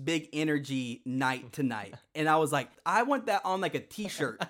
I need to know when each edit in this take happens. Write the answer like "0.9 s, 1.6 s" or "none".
2.8 s

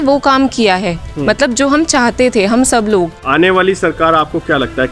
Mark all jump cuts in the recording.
3.2 s

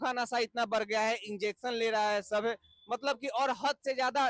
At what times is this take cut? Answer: none

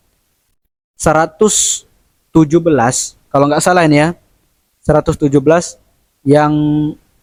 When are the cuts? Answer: none

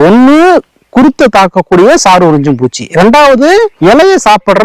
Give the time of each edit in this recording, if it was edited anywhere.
3.7 s

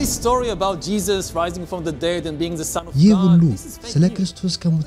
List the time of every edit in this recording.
2.9 s

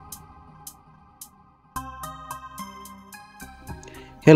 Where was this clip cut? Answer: 3.1 s

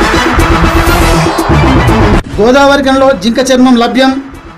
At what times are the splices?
none

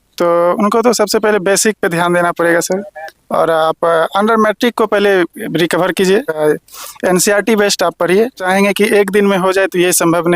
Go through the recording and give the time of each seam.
6.4 s, 8.4 s

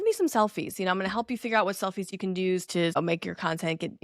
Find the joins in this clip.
2.6 s

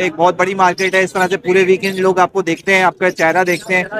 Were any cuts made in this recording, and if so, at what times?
none

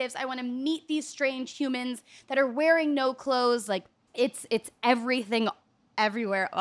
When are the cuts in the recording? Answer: 4.0 s

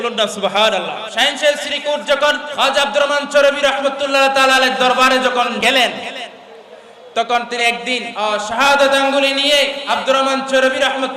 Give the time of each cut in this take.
1.0 s, 2.5 s, 5.6 s, 8.1 s, 9.8 s

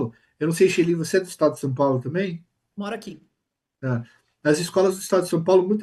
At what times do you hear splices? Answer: none

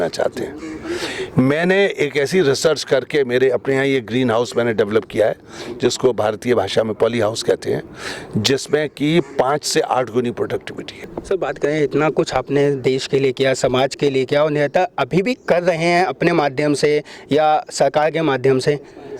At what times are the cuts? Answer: 11.1 s

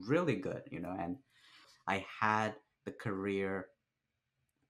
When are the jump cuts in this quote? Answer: 1.7 s

